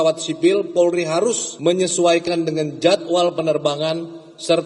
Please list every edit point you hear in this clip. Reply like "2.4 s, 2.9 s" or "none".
1.5 s